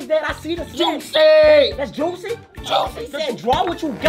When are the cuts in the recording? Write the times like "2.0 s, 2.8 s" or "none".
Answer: 2.9 s